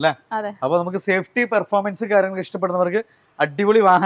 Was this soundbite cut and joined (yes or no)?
no